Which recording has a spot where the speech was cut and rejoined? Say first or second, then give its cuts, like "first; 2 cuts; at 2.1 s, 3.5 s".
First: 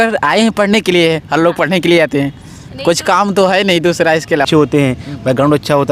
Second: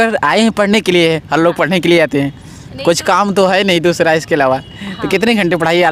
first; 1 cut; at 4.4 s